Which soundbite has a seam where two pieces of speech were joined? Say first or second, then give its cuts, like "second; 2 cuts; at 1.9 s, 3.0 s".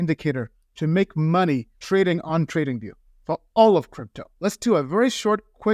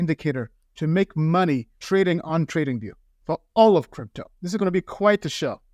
first; 1 cut; at 4.2 s